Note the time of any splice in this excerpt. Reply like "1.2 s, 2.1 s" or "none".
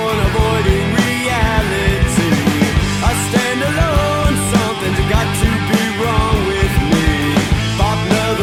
none